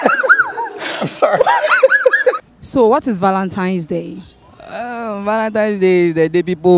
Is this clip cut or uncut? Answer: cut